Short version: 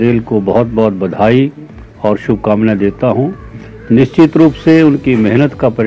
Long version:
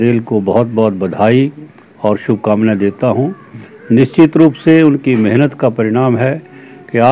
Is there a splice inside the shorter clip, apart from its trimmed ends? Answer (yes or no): no